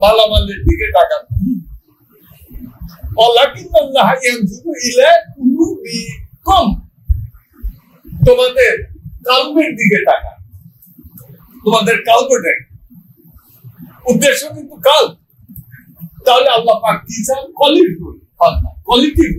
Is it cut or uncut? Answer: uncut